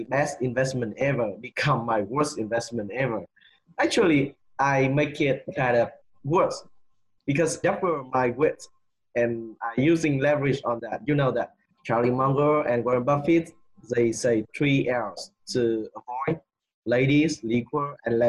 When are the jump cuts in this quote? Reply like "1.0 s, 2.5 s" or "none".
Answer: 7.6 s